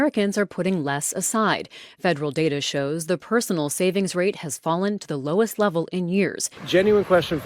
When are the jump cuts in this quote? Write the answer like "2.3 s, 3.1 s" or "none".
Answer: 6.5 s